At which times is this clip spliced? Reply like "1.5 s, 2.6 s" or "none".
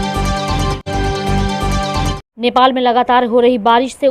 2.2 s